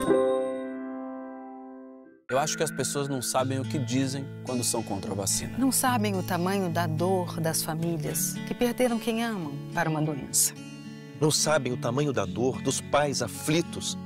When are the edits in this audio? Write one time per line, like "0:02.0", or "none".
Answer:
0:02.1